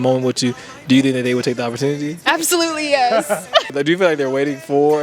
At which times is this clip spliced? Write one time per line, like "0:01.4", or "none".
0:02.2
0:03.8